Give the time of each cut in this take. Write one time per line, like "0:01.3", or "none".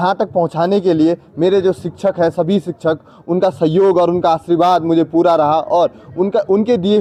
none